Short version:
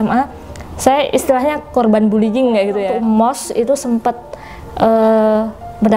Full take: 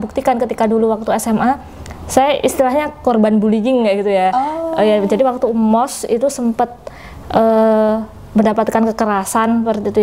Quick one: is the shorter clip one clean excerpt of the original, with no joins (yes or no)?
no